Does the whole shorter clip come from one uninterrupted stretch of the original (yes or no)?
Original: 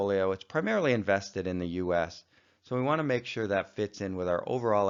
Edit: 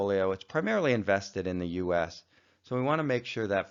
yes